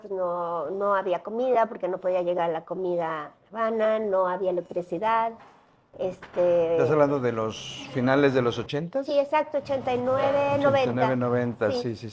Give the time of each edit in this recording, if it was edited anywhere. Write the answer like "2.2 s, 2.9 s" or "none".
none